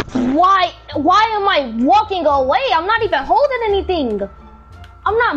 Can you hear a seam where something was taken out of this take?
no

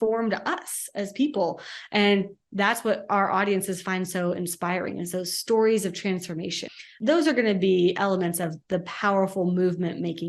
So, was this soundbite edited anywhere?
yes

